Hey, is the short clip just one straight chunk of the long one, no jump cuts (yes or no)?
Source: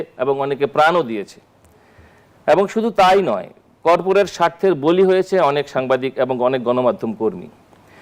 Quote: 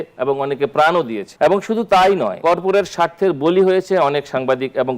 no